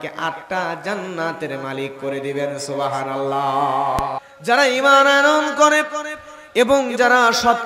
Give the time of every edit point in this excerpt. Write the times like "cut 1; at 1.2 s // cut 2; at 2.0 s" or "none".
cut 1; at 4.2 s